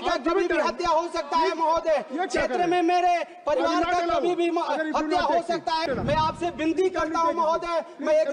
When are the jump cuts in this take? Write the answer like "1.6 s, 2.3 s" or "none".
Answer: 5.9 s